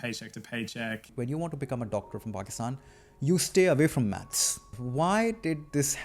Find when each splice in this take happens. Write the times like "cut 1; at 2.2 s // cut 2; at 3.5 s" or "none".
cut 1; at 1.1 s // cut 2; at 4.8 s